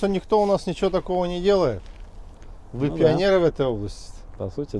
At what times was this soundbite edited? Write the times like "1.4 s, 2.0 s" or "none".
none